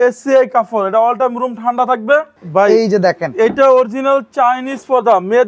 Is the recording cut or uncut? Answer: cut